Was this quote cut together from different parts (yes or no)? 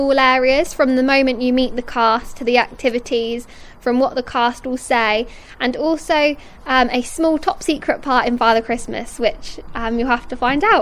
no